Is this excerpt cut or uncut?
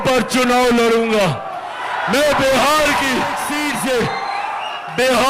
cut